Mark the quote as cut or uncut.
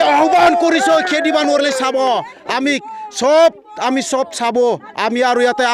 uncut